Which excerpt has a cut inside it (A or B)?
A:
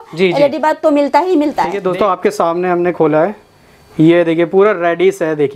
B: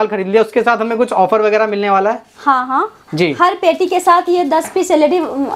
A